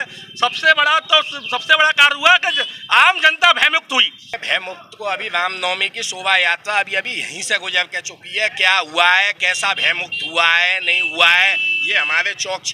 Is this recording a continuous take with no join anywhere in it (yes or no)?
no